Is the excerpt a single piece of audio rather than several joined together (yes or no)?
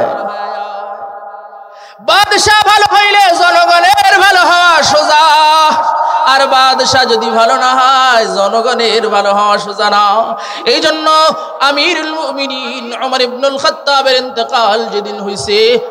yes